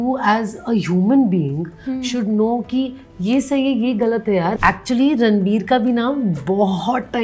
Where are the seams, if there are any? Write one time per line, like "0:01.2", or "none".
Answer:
0:04.5